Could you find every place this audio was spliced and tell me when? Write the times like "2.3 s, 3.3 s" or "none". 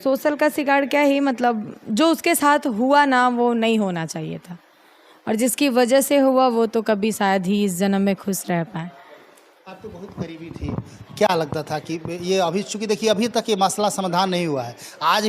none